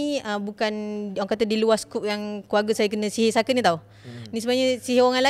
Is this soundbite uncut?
yes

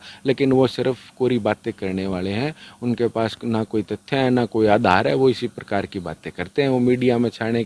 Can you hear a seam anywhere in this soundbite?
no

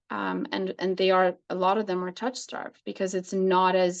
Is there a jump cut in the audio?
no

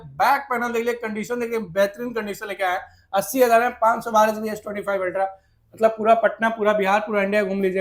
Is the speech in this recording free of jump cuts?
yes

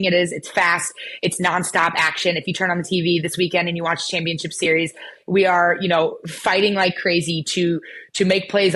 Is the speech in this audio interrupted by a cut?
no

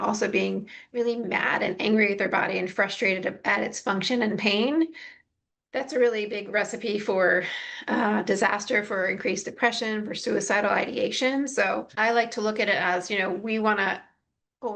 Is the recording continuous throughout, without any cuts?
yes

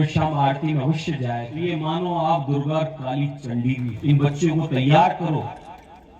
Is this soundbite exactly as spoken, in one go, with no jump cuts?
no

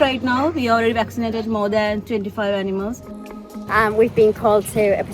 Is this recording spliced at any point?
yes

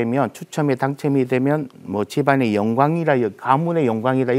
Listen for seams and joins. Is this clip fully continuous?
yes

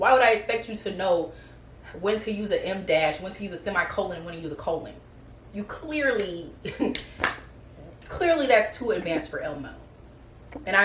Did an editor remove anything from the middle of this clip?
no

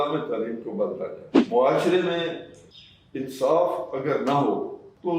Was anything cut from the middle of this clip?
yes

